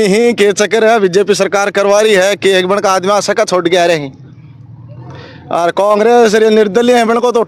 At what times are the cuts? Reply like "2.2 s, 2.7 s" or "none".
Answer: none

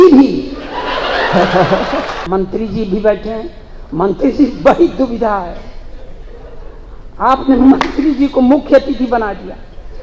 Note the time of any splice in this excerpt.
2.2 s

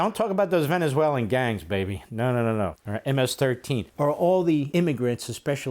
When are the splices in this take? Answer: 2.8 s, 3.9 s, 4.7 s

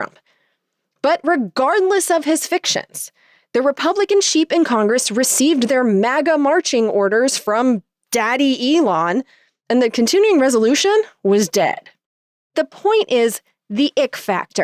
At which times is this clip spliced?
12.5 s

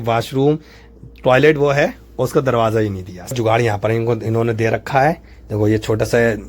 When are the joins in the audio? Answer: 3.3 s

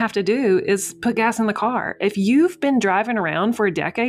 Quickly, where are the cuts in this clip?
none

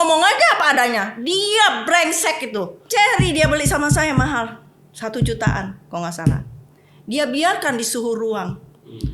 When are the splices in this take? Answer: 2.8 s

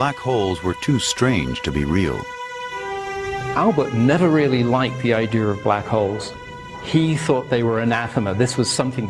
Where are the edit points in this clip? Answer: 7.5 s

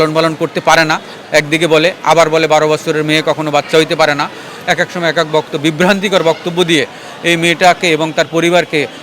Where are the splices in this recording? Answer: none

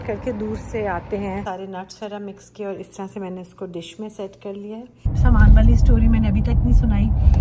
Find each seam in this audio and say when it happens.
1.4 s, 5.1 s

